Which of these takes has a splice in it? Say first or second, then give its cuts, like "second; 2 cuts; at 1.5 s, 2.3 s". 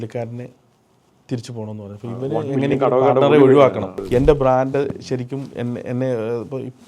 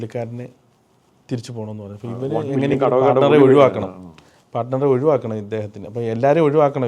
first; 1 cut; at 4.0 s